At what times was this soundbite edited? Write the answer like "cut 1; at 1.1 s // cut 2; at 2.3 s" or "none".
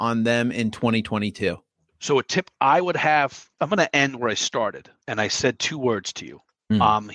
cut 1; at 1.7 s // cut 2; at 3.4 s